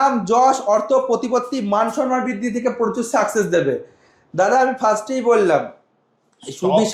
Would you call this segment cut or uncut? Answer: uncut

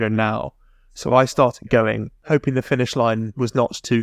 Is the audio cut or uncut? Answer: cut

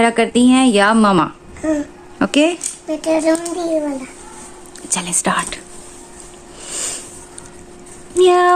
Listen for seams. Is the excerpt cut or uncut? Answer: uncut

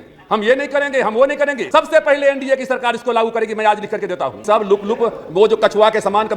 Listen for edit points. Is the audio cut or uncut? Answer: cut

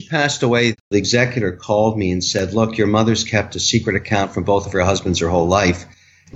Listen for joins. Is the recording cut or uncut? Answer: cut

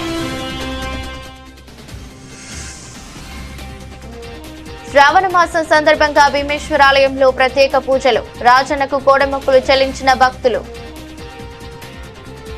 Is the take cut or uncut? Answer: uncut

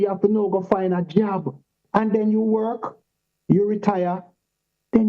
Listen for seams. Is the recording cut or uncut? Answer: cut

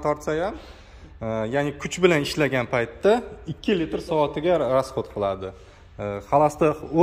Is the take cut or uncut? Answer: uncut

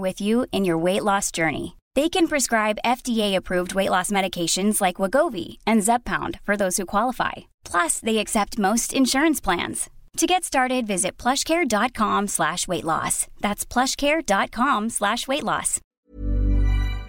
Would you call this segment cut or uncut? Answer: cut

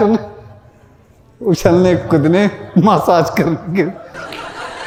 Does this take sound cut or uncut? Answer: uncut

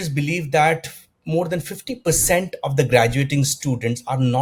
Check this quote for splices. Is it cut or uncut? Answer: uncut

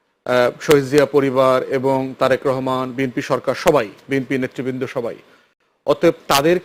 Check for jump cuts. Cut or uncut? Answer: uncut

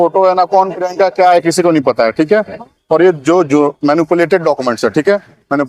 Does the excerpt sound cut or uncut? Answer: uncut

